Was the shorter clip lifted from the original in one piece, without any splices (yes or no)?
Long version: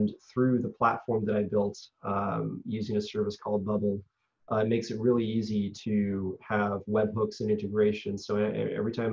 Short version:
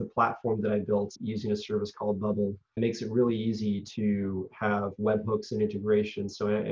no